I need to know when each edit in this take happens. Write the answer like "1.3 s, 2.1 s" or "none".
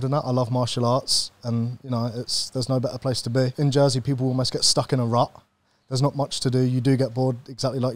3.5 s